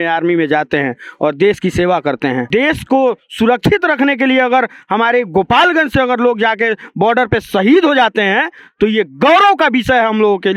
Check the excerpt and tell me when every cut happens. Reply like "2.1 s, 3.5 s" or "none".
2.4 s